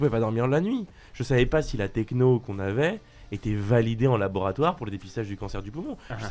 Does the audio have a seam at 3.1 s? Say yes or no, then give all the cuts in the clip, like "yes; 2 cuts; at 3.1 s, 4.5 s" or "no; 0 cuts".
no; 0 cuts